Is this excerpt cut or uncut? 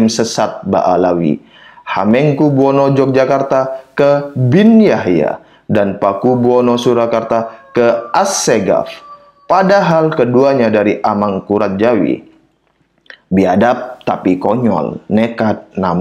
uncut